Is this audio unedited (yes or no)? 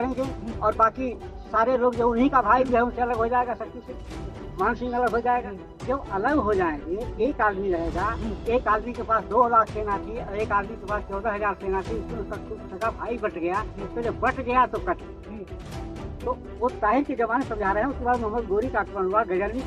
yes